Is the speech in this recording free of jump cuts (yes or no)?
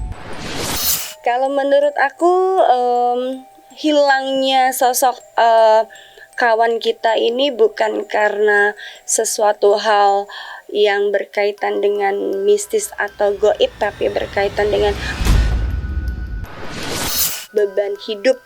no